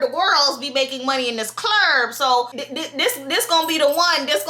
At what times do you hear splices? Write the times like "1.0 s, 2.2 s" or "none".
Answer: 2.6 s